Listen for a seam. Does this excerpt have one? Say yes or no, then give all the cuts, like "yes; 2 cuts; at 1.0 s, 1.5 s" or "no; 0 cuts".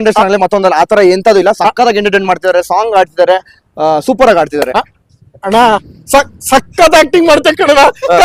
no; 0 cuts